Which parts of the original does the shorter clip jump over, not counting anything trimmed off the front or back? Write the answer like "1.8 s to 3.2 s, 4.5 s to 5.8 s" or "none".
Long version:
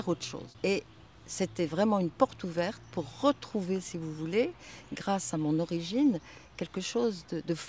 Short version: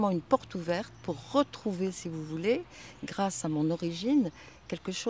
none